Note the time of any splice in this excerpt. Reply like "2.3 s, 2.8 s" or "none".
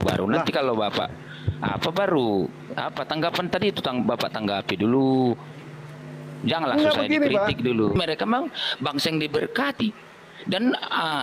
8.0 s